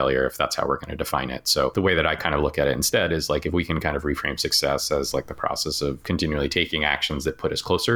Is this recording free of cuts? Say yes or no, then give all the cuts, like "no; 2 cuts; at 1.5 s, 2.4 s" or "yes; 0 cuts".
no; 2 cuts; at 1.7 s, 6.0 s